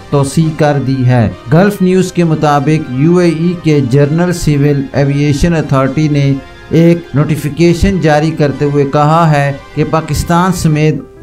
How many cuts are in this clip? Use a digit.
2